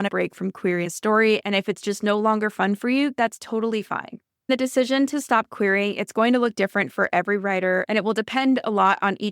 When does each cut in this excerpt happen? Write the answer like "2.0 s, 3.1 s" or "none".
4.5 s